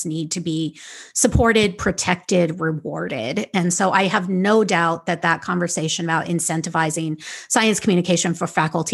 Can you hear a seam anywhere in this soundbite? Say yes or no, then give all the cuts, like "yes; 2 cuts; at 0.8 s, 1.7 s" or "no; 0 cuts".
no; 0 cuts